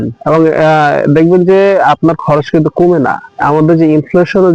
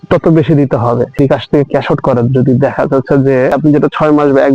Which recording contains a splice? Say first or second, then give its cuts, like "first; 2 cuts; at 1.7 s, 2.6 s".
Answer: second; 2 cuts; at 1.1 s, 3.5 s